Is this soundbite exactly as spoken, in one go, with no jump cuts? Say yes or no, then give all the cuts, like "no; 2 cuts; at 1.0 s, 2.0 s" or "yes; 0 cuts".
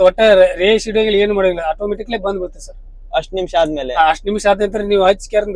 yes; 0 cuts